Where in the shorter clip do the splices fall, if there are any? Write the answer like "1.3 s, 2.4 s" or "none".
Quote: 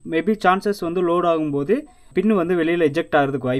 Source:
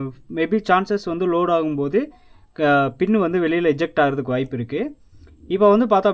2.1 s